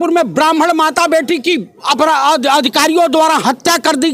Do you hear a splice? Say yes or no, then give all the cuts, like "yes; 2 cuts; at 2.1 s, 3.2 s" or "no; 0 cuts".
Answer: no; 0 cuts